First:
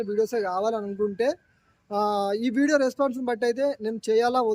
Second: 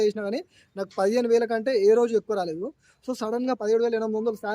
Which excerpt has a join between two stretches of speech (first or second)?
second